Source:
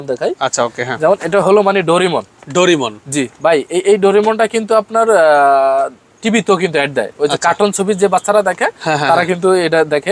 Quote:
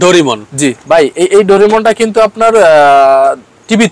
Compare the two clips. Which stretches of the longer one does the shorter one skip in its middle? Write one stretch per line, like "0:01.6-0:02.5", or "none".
none